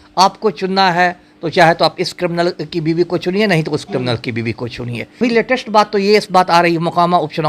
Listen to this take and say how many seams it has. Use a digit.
1